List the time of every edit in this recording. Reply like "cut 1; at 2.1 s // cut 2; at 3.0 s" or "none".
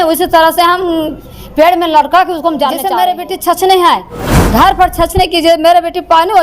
cut 1; at 2.8 s